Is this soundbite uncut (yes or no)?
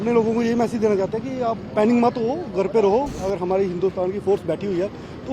no